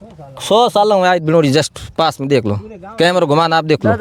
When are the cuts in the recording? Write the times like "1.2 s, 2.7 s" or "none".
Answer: none